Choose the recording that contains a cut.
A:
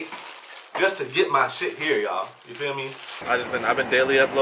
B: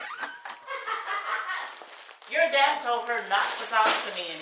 A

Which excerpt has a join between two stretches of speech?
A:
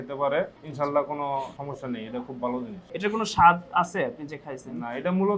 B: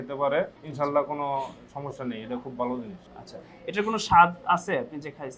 A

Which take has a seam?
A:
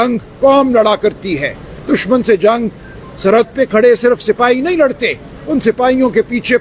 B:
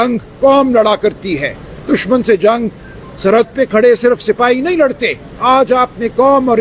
B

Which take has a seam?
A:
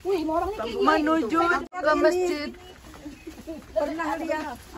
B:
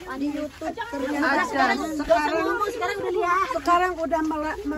A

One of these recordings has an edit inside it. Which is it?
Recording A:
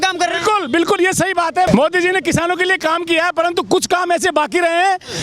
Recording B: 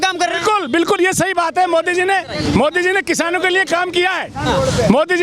A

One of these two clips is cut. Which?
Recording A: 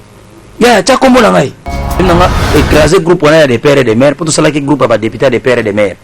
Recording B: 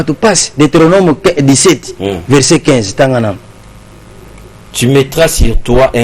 A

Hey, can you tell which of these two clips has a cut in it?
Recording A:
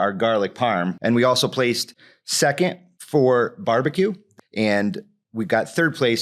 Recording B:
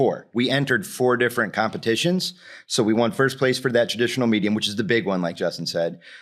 A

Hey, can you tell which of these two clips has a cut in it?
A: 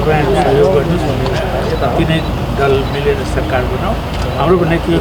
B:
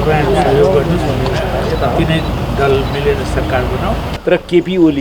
B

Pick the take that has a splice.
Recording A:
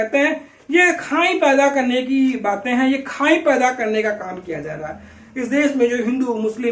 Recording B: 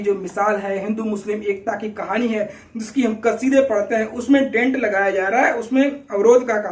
A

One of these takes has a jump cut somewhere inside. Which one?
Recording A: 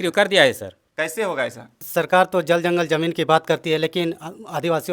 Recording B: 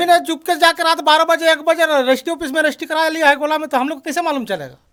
A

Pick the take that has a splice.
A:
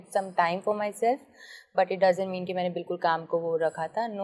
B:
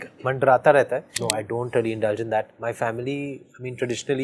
B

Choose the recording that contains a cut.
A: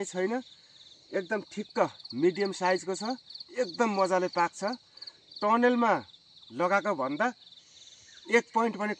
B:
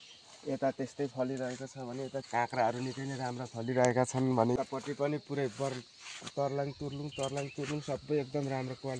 B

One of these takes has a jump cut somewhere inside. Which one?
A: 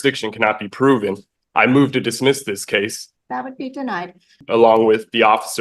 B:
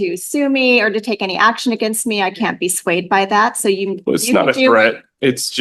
A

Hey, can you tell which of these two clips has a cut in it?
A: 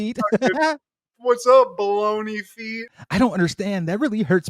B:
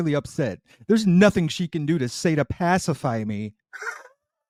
A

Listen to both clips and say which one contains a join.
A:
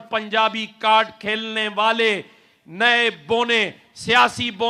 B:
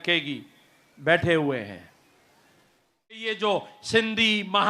B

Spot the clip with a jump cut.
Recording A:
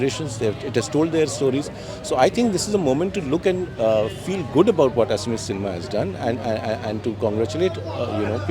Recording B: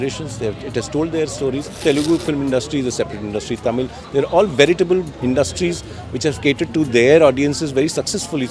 B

